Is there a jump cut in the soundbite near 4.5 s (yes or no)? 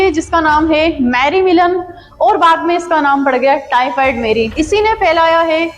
yes